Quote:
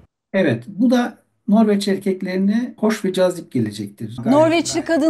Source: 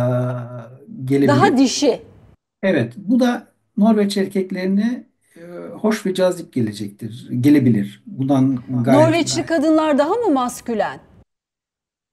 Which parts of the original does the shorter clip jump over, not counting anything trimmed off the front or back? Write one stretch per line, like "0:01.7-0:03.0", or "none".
0:05.0-0:05.7
0:07.1-0:08.7